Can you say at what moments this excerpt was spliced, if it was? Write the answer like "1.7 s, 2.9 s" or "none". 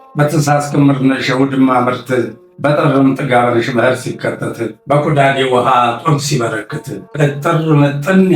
none

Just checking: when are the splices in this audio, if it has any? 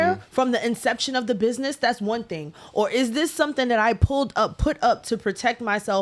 none

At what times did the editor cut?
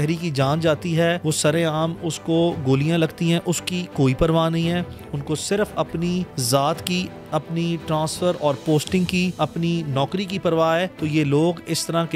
1.2 s, 6.4 s, 9.3 s, 11.0 s

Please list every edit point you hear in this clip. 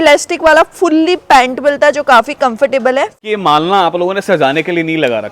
3.1 s

